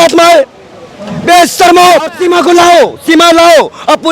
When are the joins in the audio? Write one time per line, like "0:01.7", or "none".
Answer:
0:02.1